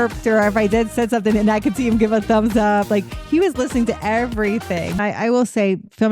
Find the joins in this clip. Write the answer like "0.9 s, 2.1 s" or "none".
5.0 s